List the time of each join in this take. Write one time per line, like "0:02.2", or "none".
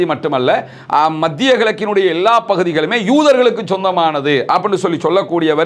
none